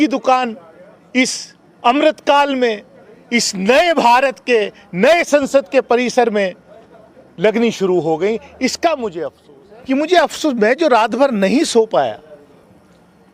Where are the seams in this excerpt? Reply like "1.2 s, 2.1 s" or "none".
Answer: 9.6 s